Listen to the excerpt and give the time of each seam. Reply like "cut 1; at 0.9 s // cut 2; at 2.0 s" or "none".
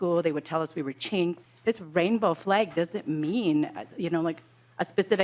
cut 1; at 1.4 s